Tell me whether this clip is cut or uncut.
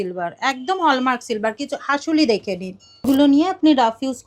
cut